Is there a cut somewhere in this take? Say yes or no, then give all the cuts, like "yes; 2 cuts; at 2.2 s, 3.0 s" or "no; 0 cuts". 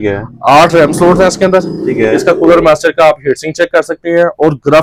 no; 0 cuts